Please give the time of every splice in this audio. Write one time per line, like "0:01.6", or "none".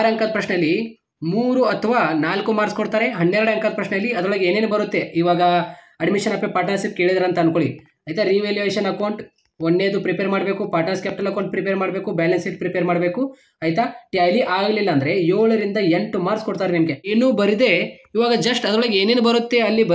0:17.1